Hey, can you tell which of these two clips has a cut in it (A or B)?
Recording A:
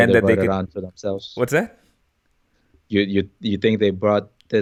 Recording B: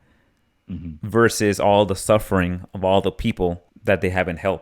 B